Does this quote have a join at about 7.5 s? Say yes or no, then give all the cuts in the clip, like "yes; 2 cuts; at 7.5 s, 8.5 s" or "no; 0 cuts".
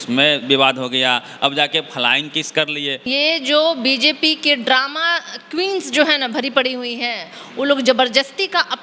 no; 1 cut; at 3.1 s